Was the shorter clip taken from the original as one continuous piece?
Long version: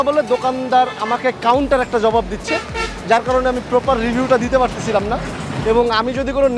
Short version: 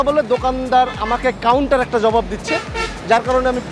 yes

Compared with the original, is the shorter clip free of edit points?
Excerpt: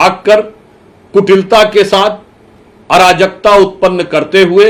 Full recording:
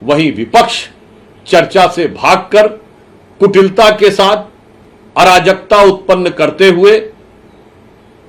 yes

